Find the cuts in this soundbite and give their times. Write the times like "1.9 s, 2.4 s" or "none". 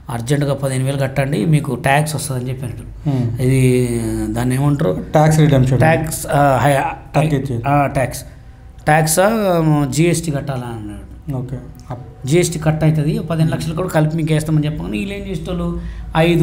none